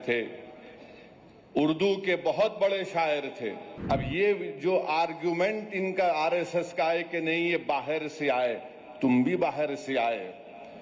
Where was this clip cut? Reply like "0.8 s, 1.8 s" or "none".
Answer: 3.7 s